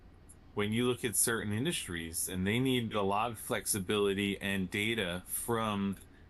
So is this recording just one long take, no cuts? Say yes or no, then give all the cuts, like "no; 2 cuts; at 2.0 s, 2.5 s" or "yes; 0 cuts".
yes; 0 cuts